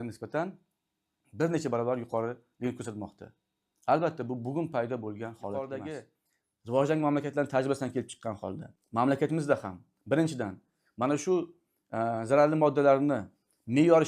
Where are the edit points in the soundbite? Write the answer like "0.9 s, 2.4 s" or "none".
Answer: 6.1 s